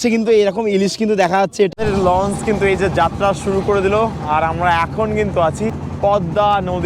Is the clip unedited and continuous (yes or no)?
no